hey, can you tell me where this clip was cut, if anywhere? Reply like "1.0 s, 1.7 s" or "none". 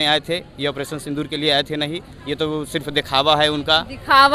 none